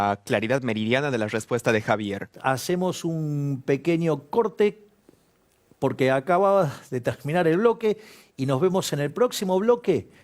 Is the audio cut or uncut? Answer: cut